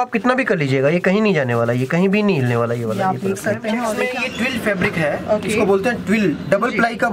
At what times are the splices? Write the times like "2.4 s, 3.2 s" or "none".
4.0 s